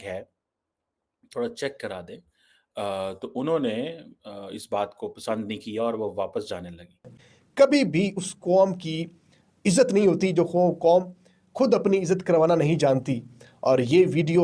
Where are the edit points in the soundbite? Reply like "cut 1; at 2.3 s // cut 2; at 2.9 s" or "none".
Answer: cut 1; at 7.3 s

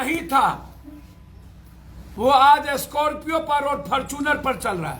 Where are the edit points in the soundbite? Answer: cut 1; at 2.1 s

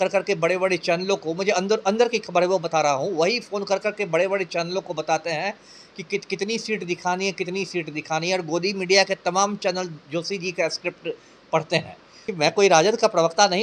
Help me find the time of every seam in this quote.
cut 1; at 12.2 s

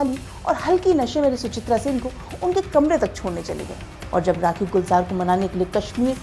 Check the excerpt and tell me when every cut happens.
cut 1; at 3.9 s

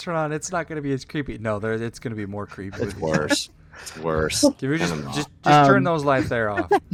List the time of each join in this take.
none

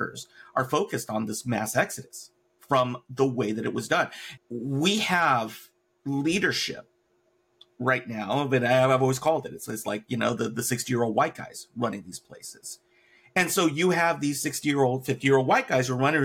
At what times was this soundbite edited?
cut 1; at 4.2 s

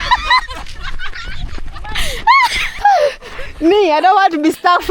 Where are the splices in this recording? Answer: cut 1; at 2.6 s

